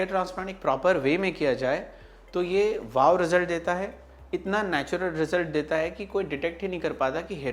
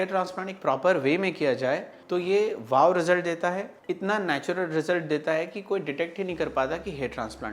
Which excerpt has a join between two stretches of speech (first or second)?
second